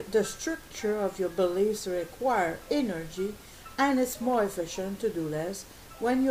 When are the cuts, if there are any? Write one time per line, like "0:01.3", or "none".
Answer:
none